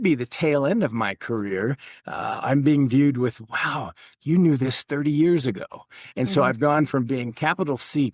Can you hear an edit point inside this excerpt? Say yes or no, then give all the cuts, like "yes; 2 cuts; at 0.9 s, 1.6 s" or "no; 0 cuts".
no; 0 cuts